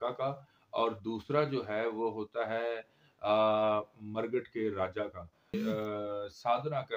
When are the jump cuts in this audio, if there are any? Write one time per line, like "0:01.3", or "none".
0:05.5